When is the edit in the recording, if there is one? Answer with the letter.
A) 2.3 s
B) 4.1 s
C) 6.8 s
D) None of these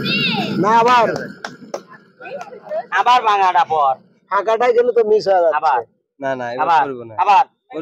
D